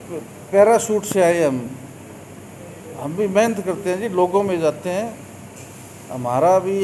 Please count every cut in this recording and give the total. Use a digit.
0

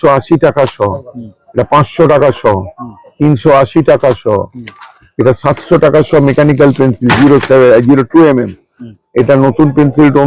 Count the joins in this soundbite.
0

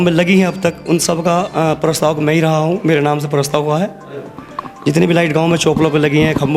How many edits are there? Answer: 0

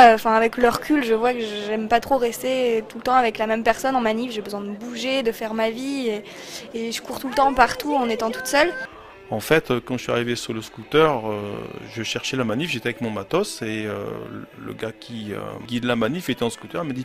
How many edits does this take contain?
2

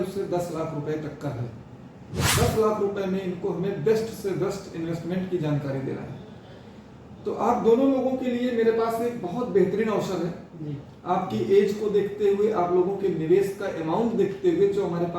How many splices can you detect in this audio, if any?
1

